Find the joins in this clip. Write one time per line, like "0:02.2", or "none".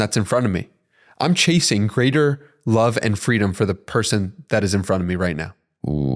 none